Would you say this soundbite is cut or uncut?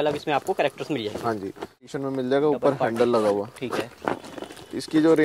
cut